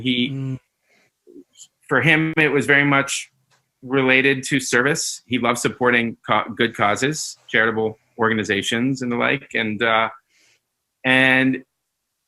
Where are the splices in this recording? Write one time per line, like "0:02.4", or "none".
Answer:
none